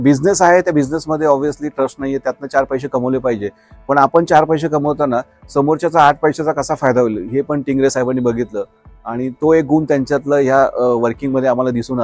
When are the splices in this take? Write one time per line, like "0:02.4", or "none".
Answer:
none